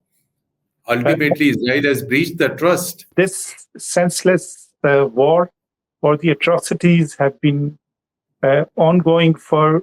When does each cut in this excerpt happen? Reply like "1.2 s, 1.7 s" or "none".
3.1 s